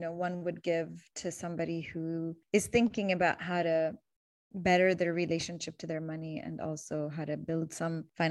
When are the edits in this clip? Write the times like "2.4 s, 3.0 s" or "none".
none